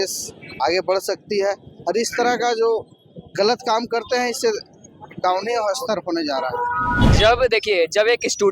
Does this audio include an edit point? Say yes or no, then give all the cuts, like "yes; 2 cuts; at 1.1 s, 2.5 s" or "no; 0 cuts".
yes; 1 cut; at 7.0 s